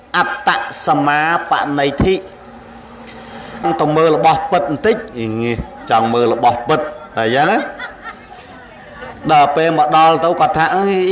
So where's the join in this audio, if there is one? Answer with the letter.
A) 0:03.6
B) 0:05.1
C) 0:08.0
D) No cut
A